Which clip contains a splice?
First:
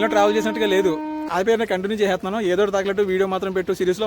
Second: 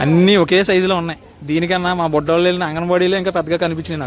first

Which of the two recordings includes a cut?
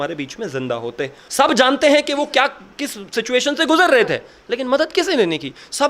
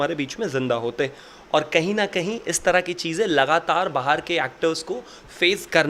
first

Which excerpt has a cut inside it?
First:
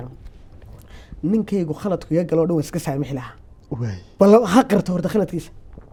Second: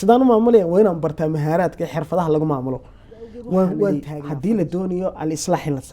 second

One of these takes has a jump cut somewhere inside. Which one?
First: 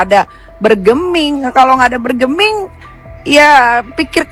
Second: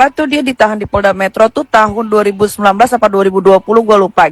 second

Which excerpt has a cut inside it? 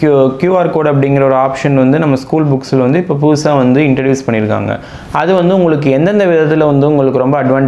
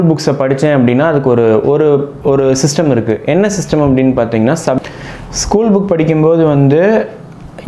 second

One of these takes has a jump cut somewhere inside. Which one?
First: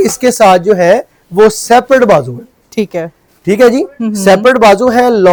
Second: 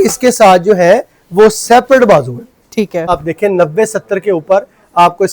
second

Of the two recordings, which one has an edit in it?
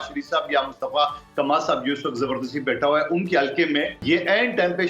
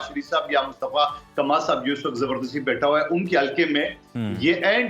first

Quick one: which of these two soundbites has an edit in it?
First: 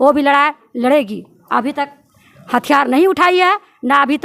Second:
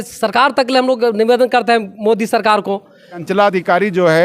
second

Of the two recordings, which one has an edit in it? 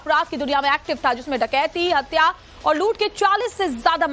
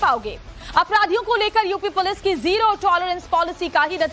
second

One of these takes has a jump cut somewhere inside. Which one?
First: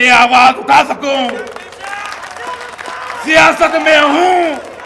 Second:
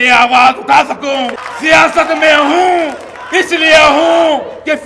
second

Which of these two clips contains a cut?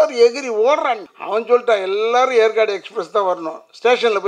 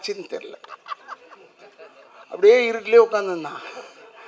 first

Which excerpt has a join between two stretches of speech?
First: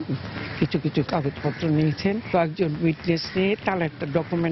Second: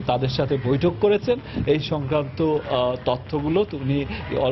first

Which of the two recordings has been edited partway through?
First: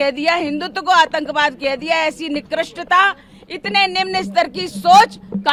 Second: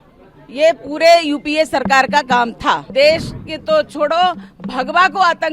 second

